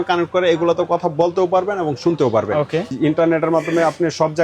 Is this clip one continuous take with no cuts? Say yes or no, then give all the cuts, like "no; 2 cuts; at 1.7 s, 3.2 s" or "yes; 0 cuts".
no; 1 cut; at 2.9 s